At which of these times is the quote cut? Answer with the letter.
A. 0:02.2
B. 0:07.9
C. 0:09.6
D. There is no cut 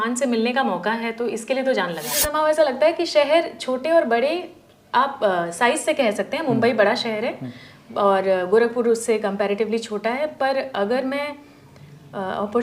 A